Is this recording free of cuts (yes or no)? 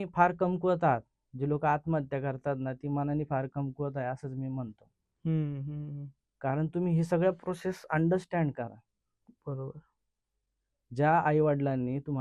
yes